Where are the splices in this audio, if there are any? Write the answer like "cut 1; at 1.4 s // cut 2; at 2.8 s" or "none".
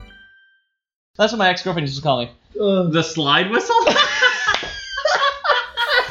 cut 1; at 1.0 s